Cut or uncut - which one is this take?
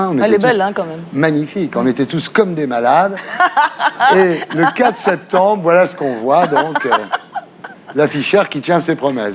uncut